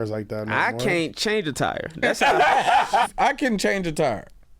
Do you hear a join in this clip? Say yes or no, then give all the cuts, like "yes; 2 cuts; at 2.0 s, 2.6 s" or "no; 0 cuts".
yes; 1 cut; at 3.1 s